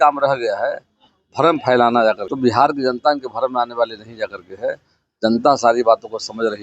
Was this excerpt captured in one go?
no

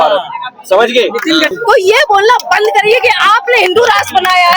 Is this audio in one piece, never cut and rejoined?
no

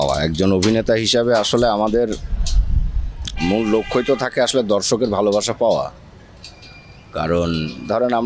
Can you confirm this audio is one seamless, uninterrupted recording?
yes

